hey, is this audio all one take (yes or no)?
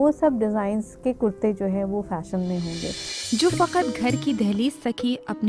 no